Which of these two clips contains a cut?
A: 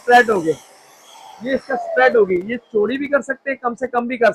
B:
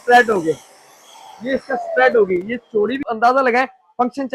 B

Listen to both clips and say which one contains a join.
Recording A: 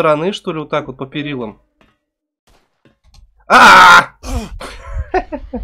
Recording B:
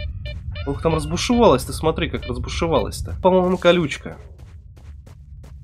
B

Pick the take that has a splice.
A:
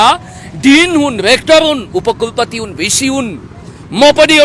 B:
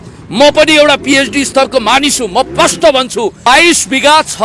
B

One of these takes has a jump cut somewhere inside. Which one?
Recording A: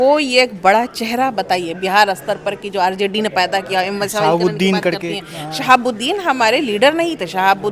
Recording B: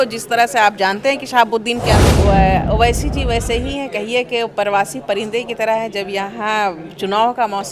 B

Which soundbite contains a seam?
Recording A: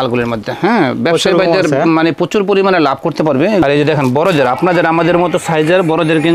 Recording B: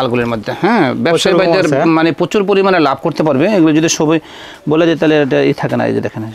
A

